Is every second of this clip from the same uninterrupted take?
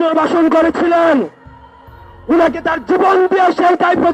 yes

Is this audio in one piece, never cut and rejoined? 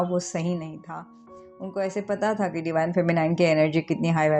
no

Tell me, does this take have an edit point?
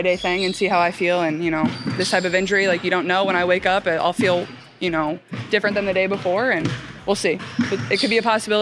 no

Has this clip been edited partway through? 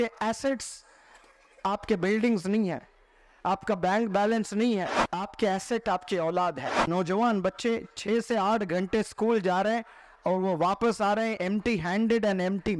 yes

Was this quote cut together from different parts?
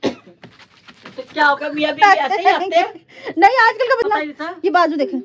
yes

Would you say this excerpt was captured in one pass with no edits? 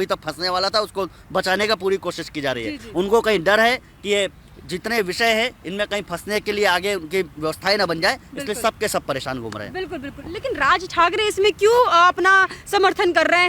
yes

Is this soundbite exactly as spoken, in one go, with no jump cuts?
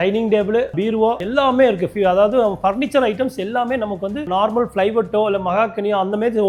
yes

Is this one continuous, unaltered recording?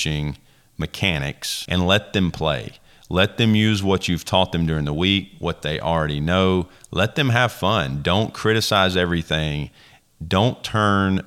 no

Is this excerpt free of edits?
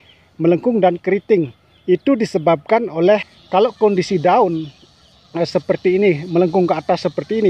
no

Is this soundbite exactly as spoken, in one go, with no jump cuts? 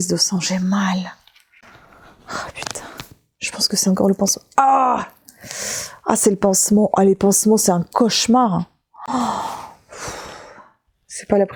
yes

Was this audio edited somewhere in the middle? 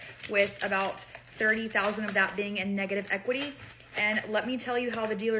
no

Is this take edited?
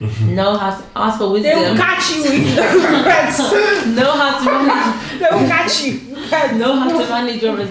no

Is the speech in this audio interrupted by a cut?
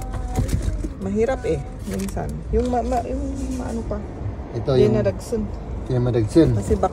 no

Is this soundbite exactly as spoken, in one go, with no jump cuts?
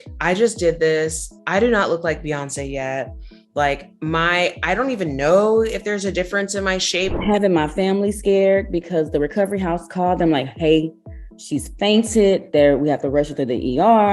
no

